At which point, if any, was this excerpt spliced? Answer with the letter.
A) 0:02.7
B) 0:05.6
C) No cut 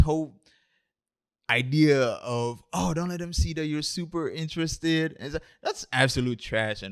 C